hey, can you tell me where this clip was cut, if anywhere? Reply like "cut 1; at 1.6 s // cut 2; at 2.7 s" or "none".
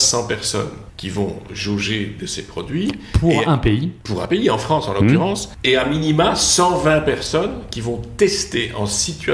cut 1; at 0.9 s // cut 2; at 1.5 s // cut 3; at 4.2 s // cut 4; at 5.5 s

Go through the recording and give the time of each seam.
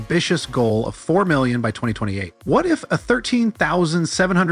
cut 1; at 2.3 s

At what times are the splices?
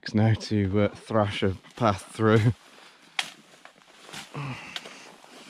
none

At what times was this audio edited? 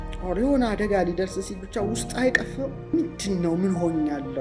cut 1; at 2.9 s

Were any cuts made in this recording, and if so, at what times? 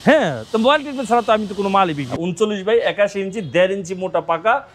cut 1; at 2.1 s

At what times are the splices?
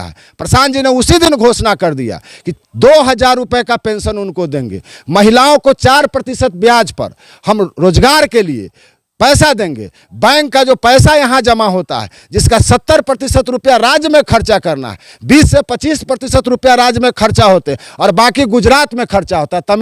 none

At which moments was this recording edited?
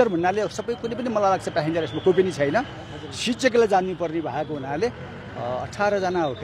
none

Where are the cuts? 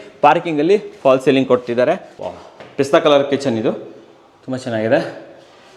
cut 1; at 2.1 s

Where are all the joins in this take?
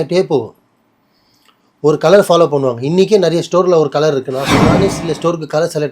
cut 1; at 4.8 s

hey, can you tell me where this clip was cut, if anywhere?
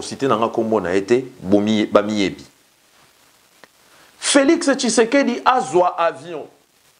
cut 1; at 2.8 s

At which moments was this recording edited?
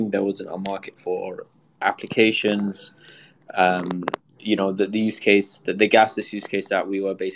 none

